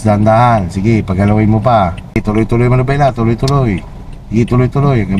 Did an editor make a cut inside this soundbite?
yes; 1 cut; at 2.2 s

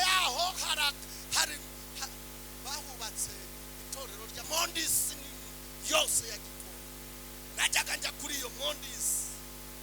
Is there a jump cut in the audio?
yes; 1 cut; at 4.4 s

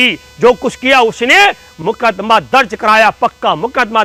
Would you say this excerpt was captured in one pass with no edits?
yes; 0 cuts

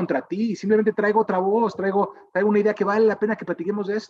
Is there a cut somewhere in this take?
no; 0 cuts

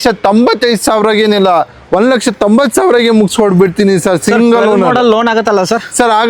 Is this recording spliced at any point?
no; 0 cuts

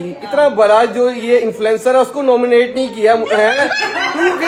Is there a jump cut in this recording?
no; 0 cuts

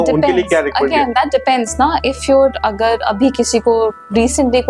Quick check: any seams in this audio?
no; 0 cuts

